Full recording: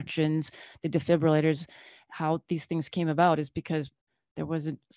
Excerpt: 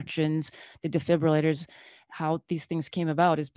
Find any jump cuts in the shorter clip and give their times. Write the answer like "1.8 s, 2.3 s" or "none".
none